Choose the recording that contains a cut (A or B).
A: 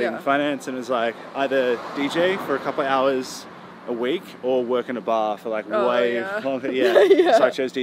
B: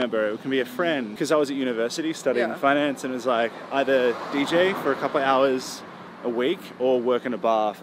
B